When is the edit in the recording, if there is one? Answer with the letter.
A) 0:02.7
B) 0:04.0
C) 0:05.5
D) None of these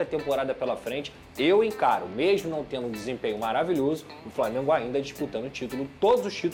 D